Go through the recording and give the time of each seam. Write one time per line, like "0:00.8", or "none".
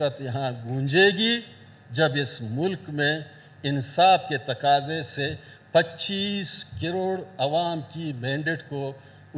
none